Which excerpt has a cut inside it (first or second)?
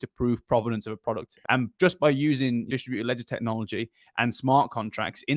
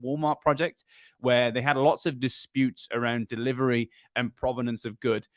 first